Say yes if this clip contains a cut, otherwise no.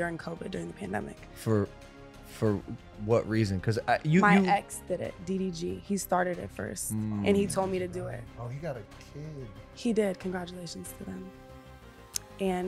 no